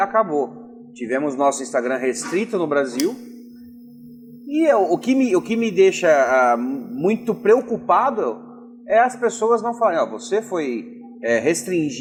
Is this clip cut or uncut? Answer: uncut